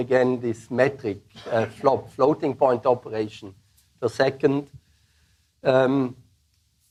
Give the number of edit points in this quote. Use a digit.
0